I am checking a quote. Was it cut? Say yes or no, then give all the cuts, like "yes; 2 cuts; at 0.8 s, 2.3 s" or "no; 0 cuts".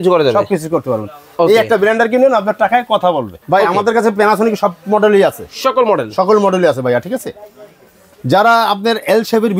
yes; 1 cut; at 3.3 s